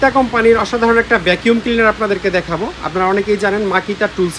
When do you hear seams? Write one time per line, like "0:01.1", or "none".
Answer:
none